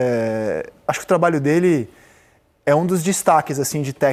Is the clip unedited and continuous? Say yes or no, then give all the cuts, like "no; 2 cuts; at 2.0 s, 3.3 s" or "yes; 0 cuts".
yes; 0 cuts